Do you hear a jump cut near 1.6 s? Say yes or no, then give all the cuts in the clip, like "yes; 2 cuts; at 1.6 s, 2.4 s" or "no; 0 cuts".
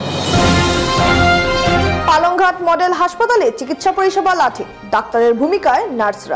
no; 0 cuts